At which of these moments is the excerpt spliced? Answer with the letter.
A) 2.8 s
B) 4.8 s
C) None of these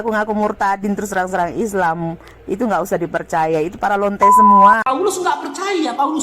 B